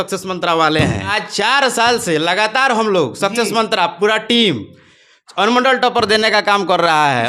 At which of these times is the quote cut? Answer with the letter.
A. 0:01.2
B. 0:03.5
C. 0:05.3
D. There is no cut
A